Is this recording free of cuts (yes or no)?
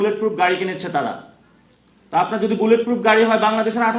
yes